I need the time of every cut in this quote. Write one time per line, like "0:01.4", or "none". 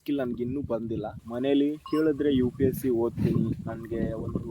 0:01.2